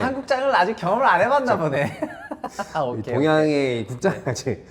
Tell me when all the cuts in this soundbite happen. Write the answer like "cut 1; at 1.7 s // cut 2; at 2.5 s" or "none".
none